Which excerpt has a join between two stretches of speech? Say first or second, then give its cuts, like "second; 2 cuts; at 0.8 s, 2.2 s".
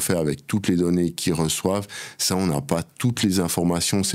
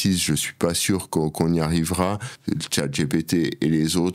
second; 1 cut; at 2.3 s